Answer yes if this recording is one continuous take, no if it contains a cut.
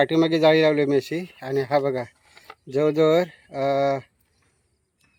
yes